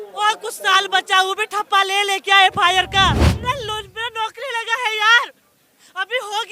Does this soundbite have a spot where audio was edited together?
yes; 1 cut; at 3.3 s

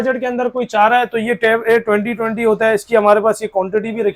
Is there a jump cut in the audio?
no; 0 cuts

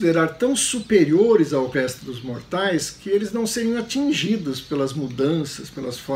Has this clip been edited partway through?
no; 0 cuts

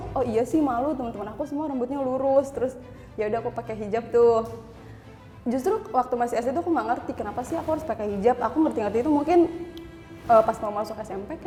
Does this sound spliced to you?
no; 0 cuts

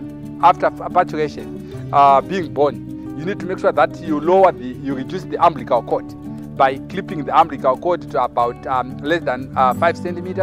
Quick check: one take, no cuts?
yes; 0 cuts

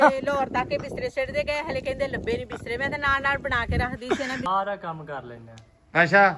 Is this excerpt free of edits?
no; 1 cut; at 4.5 s

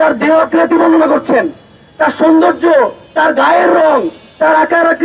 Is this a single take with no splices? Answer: yes; 0 cuts

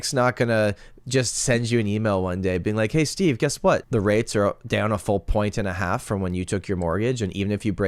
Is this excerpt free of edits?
no; 1 cut; at 3.8 s

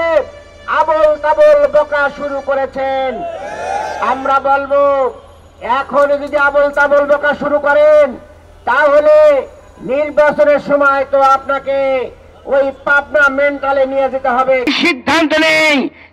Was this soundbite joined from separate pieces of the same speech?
yes; 1 cut; at 14.7 s

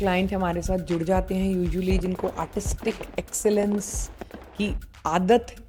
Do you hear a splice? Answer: no; 0 cuts

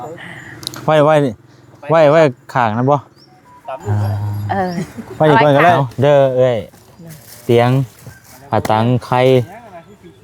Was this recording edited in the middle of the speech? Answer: yes; 1 cut; at 5.8 s

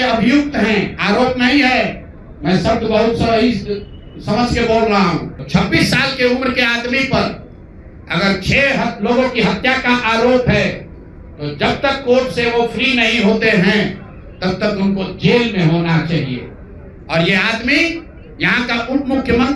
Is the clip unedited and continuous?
no; 1 cut; at 5.4 s

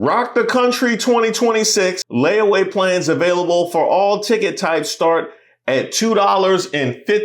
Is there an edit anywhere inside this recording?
yes; 1 cut; at 2.0 s

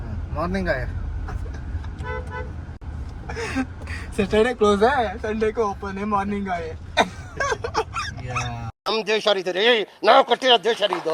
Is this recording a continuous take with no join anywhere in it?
yes; 0 cuts

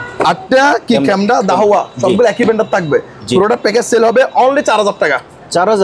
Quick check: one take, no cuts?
yes; 0 cuts

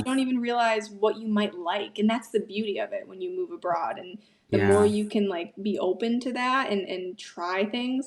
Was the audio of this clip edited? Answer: no; 0 cuts

